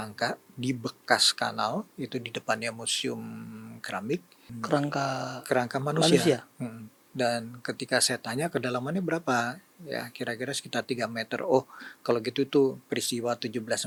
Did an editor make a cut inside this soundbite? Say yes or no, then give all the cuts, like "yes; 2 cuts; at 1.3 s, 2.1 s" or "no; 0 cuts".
no; 0 cuts